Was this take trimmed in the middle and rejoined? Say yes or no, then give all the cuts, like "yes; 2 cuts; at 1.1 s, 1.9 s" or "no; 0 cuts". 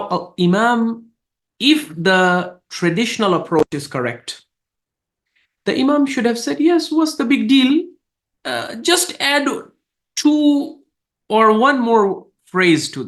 no; 0 cuts